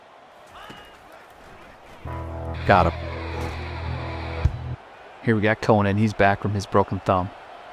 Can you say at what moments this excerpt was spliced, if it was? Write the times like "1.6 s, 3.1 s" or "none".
4.7 s